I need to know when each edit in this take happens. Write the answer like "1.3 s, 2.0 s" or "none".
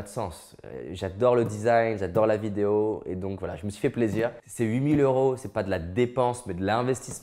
4.4 s